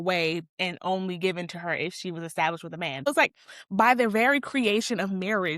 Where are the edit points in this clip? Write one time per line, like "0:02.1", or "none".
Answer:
0:03.1